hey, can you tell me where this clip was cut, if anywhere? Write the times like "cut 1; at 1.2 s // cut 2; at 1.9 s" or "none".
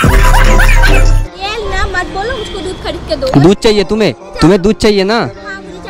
cut 1; at 1.2 s // cut 2; at 4.2 s